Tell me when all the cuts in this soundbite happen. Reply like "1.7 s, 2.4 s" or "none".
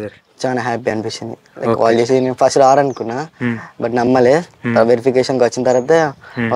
none